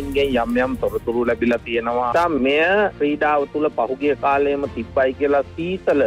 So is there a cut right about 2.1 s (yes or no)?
yes